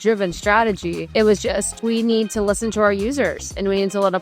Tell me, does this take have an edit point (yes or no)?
yes